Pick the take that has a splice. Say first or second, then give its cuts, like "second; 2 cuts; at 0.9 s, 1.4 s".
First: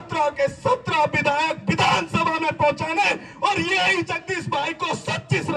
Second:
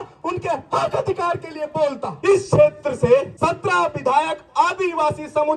second; 2 cuts; at 2.1 s, 3.3 s